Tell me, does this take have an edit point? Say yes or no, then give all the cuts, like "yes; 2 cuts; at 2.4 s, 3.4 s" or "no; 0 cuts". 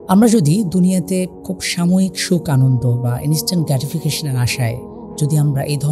yes; 1 cut; at 1.4 s